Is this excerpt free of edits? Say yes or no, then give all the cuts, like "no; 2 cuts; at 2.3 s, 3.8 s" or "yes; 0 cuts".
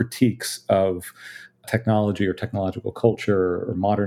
yes; 0 cuts